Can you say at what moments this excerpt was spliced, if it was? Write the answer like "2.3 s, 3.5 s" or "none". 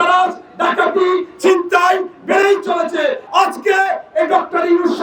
3.2 s